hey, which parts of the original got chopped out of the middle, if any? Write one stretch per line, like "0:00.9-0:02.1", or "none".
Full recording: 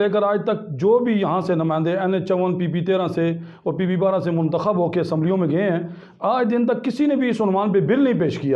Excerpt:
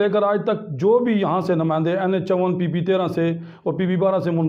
none